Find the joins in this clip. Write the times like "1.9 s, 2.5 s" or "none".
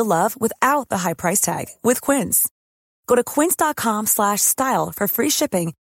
none